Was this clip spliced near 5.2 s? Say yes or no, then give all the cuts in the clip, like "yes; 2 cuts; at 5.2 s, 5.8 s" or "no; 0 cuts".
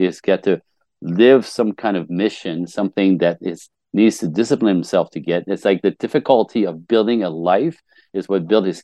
no; 0 cuts